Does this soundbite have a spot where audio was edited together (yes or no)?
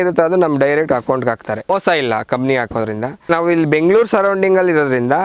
yes